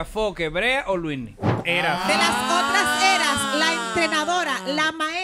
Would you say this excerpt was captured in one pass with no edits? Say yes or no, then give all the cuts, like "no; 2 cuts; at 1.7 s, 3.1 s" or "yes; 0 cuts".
no; 1 cut; at 1.5 s